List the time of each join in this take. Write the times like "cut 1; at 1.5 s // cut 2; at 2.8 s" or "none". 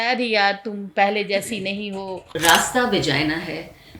cut 1; at 2.3 s

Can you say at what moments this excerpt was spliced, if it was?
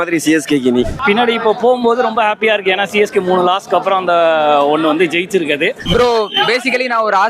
cut 1; at 1.0 s // cut 2; at 5.8 s

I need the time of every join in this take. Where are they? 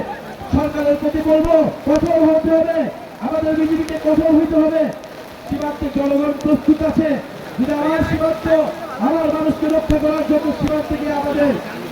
cut 1; at 1.8 s

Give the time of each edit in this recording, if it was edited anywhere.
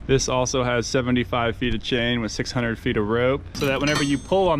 cut 1; at 3.5 s

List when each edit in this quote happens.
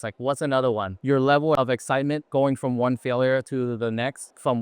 cut 1; at 0.9 s

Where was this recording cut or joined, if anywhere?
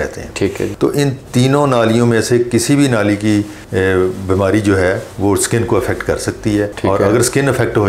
none

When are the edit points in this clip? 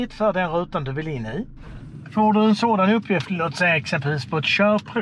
cut 1; at 1.7 s

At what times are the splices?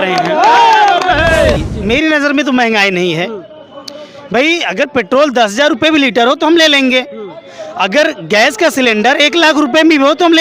cut 1; at 1.6 s

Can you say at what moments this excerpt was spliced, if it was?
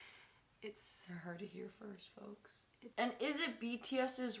cut 1; at 2.8 s

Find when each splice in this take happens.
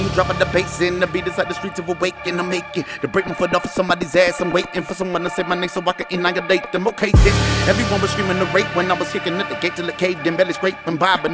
none

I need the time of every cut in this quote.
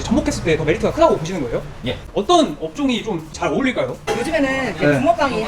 cut 1; at 2.0 s // cut 2; at 4.0 s

